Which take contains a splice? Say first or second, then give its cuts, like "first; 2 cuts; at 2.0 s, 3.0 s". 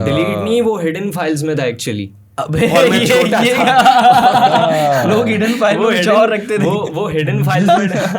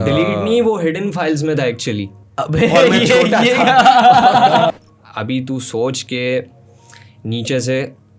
second; 1 cut; at 4.7 s